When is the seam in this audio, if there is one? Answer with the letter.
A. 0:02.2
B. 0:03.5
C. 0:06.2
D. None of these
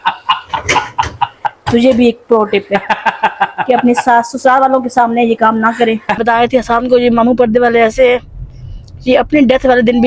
C